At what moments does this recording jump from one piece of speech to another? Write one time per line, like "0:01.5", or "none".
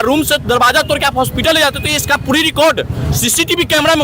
none